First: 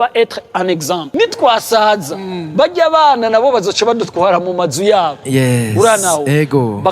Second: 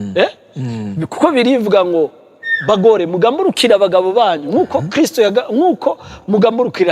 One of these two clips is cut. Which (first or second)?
first